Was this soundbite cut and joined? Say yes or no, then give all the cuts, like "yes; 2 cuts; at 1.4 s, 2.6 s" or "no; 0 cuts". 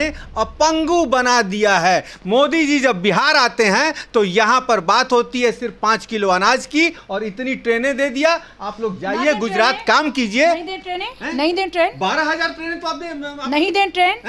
no; 0 cuts